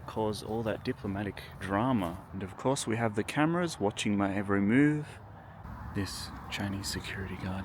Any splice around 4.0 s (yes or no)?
no